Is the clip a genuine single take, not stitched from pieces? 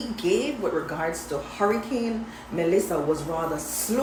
yes; 0 cuts

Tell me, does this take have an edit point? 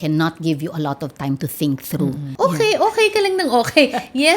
yes; 1 cut; at 2.2 s

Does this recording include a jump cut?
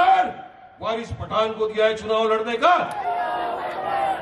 yes; 1 cut; at 2.9 s

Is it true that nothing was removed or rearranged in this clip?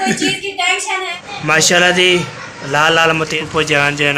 no; 2 cuts; at 1.1 s, 3.4 s

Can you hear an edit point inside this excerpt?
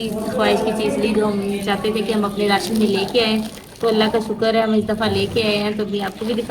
no; 0 cuts

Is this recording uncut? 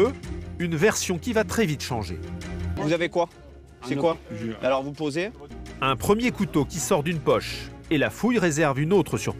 no; 2 cuts; at 2.7 s, 5.5 s

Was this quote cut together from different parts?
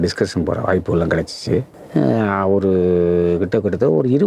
yes; 1 cut; at 1.8 s

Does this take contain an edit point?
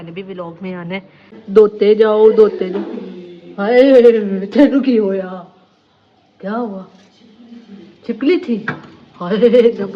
yes; 1 cut; at 1.4 s

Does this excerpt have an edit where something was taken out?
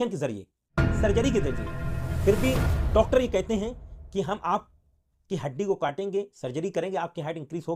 no; 0 cuts

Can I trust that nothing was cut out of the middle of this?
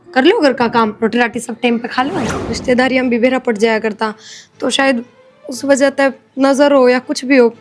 no; 1 cut; at 2.3 s

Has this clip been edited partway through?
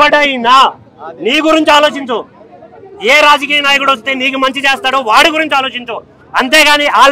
no; 0 cuts

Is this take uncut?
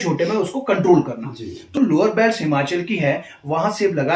no; 1 cut; at 1.8 s

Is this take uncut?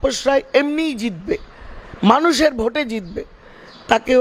yes; 0 cuts

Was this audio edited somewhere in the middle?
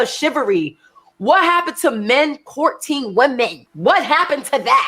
yes; 1 cut; at 3.6 s

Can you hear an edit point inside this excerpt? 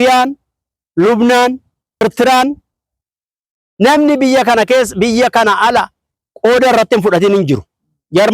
yes; 1 cut; at 2.0 s

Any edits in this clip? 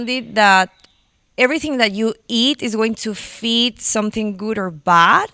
no; 0 cuts

